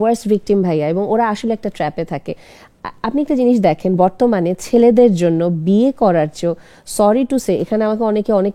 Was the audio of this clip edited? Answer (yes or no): no